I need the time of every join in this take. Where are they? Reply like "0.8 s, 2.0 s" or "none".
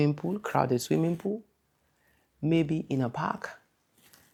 none